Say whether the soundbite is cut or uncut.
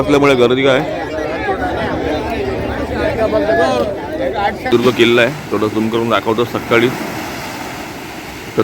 cut